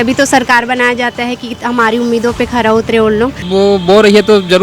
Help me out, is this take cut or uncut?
cut